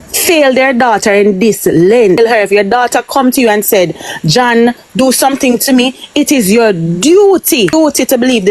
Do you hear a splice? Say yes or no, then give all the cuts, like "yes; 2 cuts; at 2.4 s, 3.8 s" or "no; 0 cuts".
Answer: yes; 2 cuts; at 2.2 s, 7.7 s